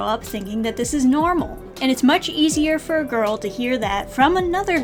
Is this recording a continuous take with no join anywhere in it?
yes; 0 cuts

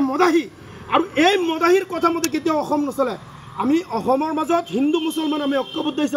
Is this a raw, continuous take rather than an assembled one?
yes; 0 cuts

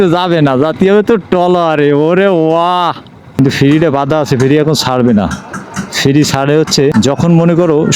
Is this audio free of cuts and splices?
no; 2 cuts; at 3.2 s, 6.9 s

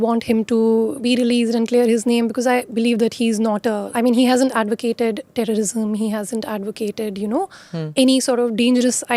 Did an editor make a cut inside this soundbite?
yes; 2 cuts; at 1.0 s, 3.9 s

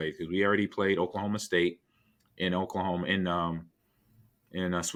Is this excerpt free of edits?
yes; 0 cuts

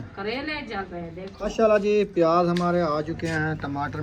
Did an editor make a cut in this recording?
yes; 1 cut; at 1.3 s

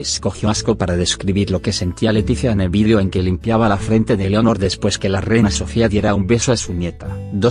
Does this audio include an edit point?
yes; 1 cut; at 5.4 s

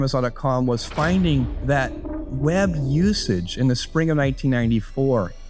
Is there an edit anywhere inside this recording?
no; 0 cuts

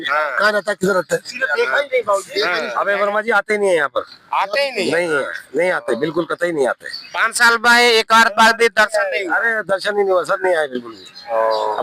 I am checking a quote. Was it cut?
no; 0 cuts

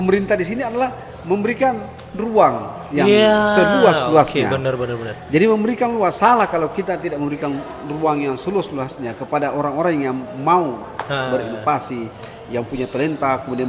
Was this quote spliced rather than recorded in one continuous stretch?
no; 0 cuts

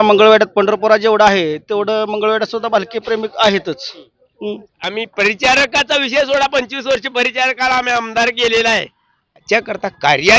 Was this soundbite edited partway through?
yes; 2 cuts; at 4.8 s, 9.4 s

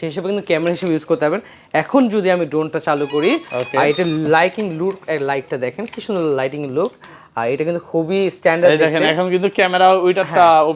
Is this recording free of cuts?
yes; 0 cuts

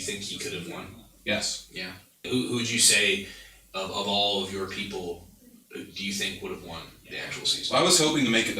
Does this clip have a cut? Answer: yes; 1 cut; at 2.3 s

